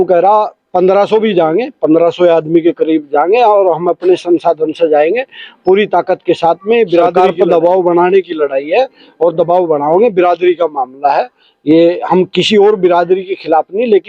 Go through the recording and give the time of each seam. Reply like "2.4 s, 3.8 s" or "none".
7.1 s